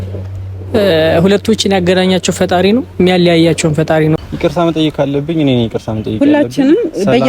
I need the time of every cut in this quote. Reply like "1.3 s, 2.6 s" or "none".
4.2 s